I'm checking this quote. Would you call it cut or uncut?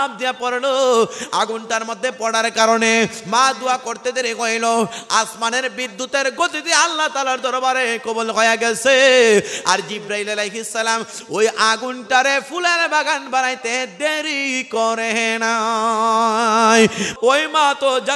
cut